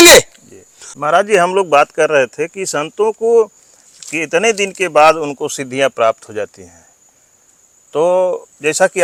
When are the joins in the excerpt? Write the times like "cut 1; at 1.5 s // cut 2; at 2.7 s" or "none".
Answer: none